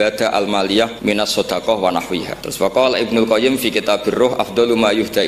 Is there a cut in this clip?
yes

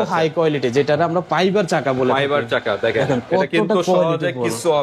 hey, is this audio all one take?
yes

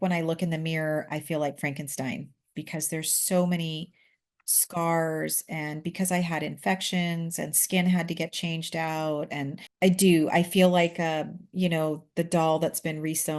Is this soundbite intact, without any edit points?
yes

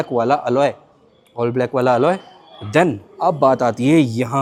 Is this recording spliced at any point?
no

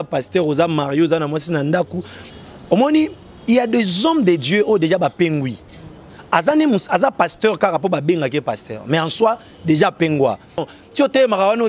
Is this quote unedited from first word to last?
no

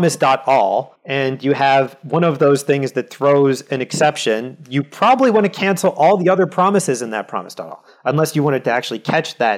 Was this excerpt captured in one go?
no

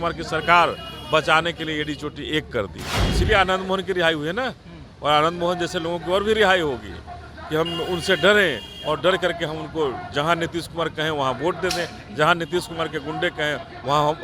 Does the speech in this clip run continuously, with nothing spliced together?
no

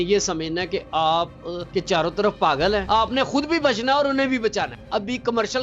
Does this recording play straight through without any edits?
no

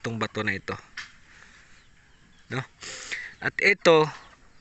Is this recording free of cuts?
yes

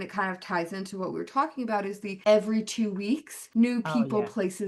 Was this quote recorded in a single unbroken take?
no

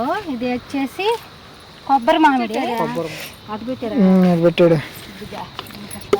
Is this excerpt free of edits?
no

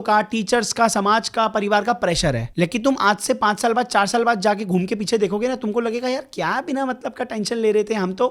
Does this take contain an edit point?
yes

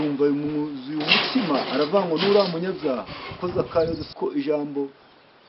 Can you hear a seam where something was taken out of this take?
yes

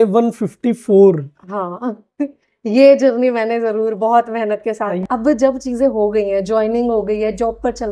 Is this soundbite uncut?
no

